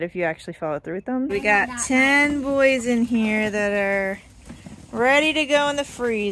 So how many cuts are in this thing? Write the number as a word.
one